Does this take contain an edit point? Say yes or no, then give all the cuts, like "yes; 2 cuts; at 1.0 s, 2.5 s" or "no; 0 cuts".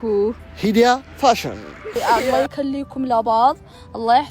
yes; 1 cut; at 1.9 s